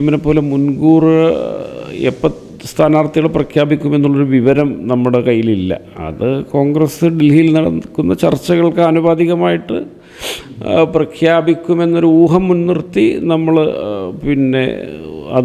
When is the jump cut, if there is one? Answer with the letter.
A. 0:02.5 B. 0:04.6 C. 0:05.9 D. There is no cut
D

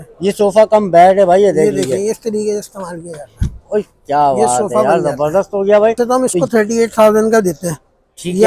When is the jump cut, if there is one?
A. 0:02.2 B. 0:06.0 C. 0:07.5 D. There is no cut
B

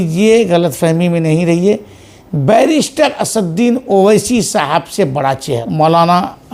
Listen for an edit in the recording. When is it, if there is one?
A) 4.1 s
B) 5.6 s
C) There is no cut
B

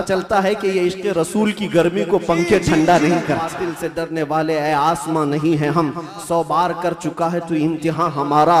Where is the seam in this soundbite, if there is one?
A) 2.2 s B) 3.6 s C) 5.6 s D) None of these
B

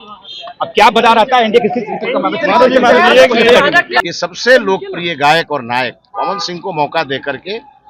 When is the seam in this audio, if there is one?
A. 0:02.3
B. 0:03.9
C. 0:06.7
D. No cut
B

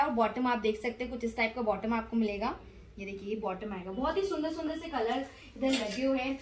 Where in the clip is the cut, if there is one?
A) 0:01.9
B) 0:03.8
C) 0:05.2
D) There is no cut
D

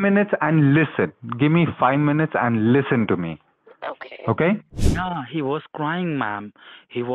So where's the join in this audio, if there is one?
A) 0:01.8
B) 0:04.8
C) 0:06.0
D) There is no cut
B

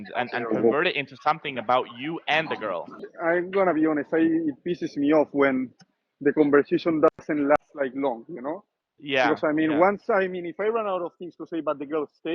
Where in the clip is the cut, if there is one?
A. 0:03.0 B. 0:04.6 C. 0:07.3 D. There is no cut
A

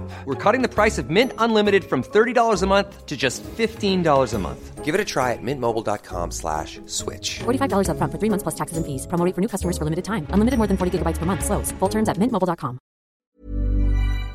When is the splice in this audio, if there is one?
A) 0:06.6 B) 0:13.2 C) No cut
B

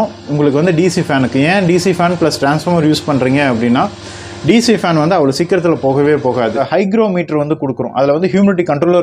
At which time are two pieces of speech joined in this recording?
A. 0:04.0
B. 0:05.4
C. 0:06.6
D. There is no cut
C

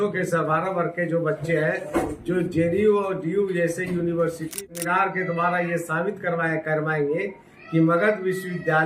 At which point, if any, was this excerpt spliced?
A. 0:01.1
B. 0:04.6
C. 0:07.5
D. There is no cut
B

